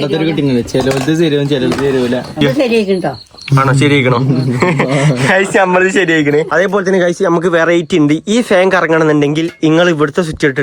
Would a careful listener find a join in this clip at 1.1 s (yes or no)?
no